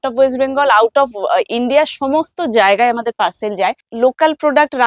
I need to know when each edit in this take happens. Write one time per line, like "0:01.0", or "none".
0:03.8